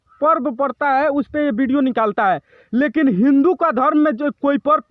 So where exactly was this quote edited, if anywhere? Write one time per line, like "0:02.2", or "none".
none